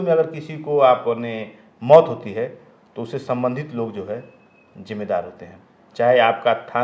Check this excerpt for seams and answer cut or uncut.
uncut